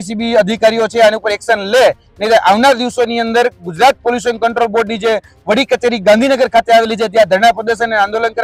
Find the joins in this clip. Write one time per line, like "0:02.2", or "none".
none